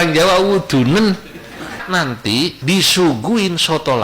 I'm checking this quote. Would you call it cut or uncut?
cut